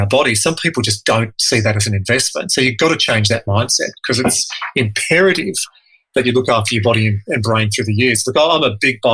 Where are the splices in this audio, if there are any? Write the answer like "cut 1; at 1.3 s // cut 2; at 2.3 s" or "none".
none

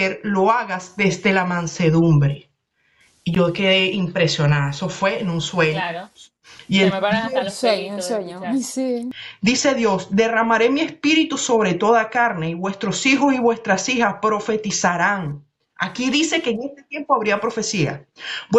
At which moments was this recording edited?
cut 1; at 9.2 s

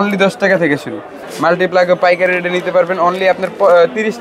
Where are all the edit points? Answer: cut 1; at 1.2 s

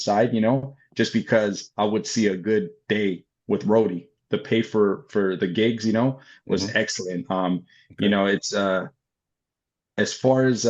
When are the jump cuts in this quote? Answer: cut 1; at 4.1 s

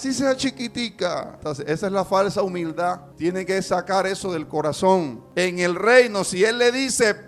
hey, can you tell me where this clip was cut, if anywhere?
cut 1; at 1.4 s // cut 2; at 3.1 s // cut 3; at 5.2 s

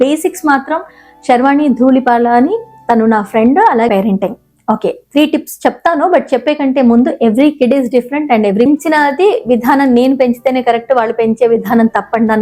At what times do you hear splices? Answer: cut 1; at 3.9 s // cut 2; at 8.7 s

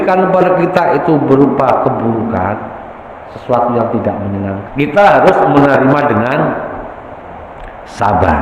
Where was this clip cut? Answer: cut 1; at 4.6 s

